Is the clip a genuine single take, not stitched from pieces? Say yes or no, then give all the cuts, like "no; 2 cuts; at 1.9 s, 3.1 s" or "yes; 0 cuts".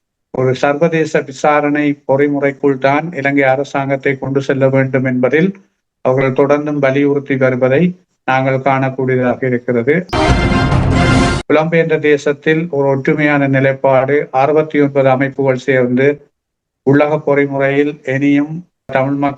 no; 2 cuts; at 10.0 s, 11.3 s